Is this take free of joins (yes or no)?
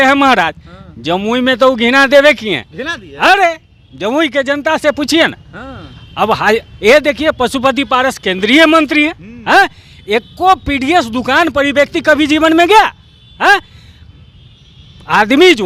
yes